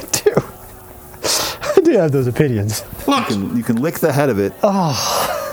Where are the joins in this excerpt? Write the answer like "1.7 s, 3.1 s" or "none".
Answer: 3.2 s